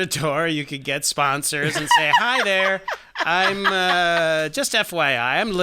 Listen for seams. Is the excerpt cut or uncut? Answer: uncut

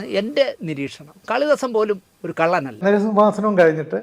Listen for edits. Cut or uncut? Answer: cut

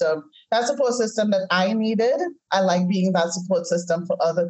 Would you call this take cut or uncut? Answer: uncut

